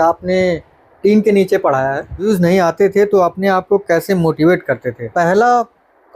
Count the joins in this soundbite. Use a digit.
2